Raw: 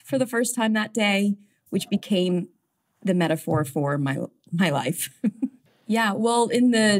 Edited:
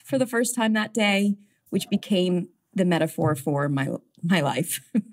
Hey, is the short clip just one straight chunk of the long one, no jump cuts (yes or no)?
no